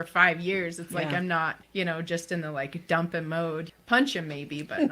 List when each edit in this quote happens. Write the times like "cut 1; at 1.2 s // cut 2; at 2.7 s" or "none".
cut 1; at 1.6 s // cut 2; at 3.7 s